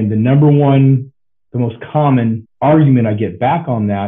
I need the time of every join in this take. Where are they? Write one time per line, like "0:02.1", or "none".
0:02.5